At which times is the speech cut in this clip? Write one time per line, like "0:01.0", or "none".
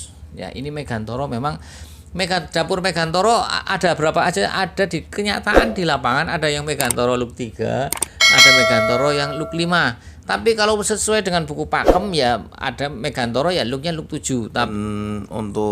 0:14.7